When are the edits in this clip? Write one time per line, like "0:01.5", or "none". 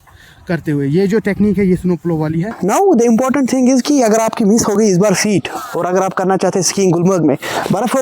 0:02.6